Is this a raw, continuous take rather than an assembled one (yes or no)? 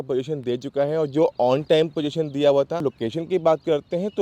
no